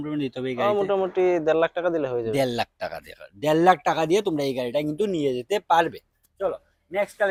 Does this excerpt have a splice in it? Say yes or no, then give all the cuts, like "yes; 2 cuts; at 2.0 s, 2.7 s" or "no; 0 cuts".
no; 0 cuts